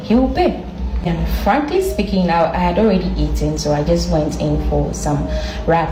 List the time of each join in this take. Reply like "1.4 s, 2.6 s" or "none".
none